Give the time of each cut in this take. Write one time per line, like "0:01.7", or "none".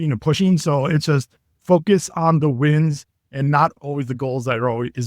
0:03.8